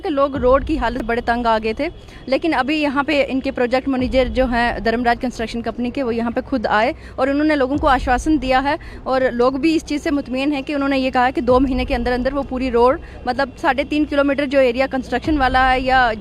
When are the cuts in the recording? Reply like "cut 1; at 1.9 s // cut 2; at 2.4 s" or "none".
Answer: cut 1; at 1.0 s